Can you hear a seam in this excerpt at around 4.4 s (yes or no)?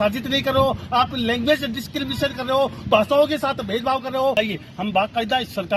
yes